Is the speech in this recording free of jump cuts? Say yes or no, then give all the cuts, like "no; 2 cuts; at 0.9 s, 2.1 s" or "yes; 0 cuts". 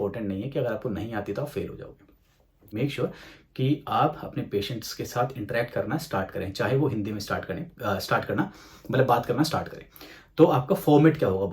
no; 1 cut; at 2.7 s